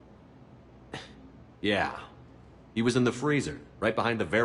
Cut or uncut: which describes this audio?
cut